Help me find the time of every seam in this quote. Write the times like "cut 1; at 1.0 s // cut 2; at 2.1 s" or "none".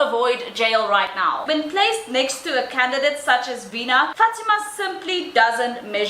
cut 1; at 1.4 s // cut 2; at 4.1 s